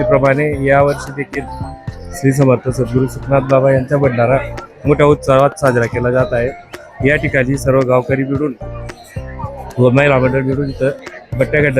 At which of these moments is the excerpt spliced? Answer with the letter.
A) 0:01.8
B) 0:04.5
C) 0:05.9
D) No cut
D